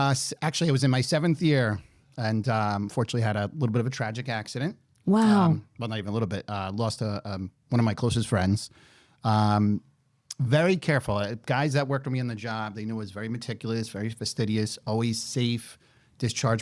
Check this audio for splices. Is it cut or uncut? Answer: uncut